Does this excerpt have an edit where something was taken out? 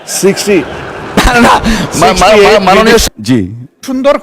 yes; 1 cut; at 3.1 s

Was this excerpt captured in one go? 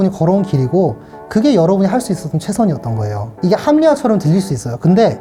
yes; 0 cuts

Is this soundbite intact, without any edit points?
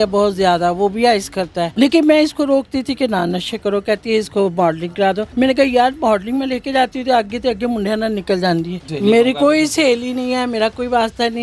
no; 3 cuts; at 1.7 s, 5.3 s, 8.9 s

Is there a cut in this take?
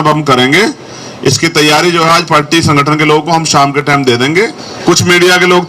yes; 1 cut; at 4.6 s

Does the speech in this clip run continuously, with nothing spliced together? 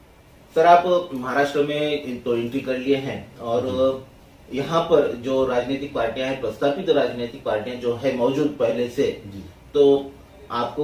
yes; 0 cuts

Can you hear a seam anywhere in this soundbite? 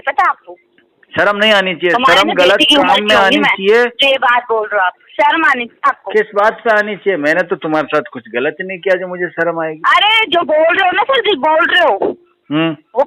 no; 0 cuts

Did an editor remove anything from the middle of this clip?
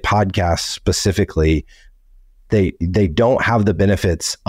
no; 0 cuts

